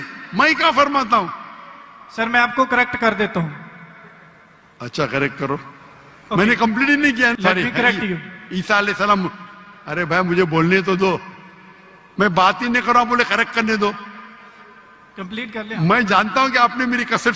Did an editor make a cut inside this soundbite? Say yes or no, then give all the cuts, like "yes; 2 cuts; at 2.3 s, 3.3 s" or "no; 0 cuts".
yes; 1 cut; at 7.3 s